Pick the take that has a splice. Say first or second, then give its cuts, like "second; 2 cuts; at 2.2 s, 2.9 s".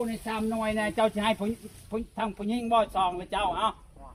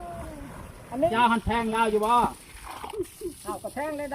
second; 1 cut; at 1.1 s